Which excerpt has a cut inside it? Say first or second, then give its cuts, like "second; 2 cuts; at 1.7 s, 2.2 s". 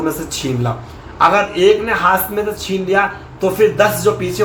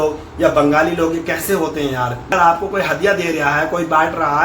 second; 1 cut; at 2.3 s